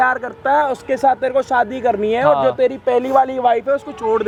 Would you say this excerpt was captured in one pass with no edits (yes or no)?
yes